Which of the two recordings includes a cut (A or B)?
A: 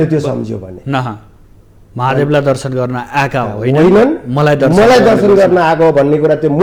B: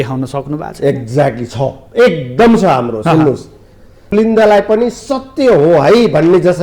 B